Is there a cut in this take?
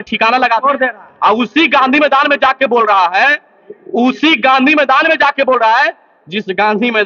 no; 0 cuts

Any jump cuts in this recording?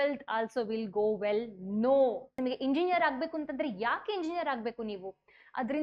yes; 1 cut; at 2.3 s

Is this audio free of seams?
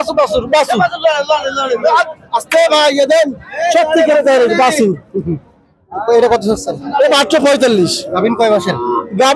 yes; 0 cuts

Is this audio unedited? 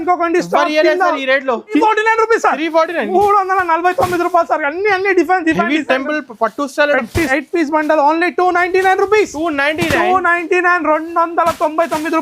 no; 2 cuts; at 1.8 s, 7.3 s

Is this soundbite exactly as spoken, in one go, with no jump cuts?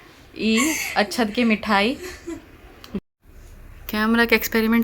no; 1 cut; at 3.0 s

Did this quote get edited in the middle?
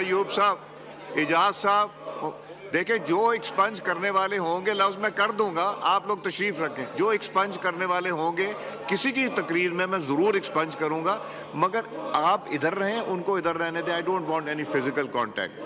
no; 0 cuts

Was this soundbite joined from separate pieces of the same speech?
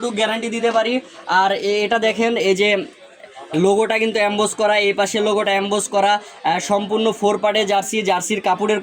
no; 0 cuts

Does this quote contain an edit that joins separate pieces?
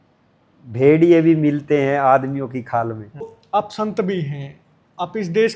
yes; 1 cut; at 3.4 s

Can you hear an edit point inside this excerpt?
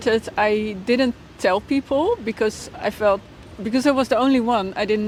no; 0 cuts

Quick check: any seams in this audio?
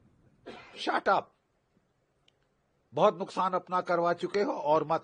no; 0 cuts

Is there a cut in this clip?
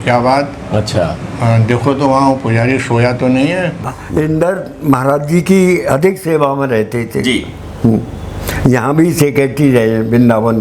yes; 1 cut; at 3.8 s

